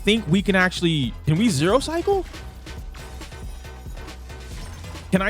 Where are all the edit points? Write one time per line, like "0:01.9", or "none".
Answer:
0:01.2